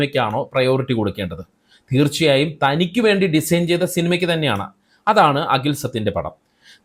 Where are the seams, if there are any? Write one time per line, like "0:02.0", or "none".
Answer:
none